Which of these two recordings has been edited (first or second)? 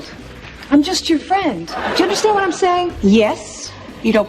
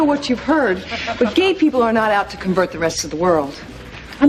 first